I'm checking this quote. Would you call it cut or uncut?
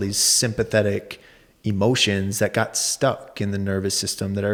uncut